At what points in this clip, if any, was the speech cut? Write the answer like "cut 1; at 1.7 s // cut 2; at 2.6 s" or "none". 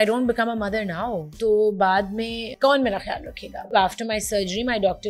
cut 1; at 1.3 s // cut 2; at 2.6 s // cut 3; at 3.6 s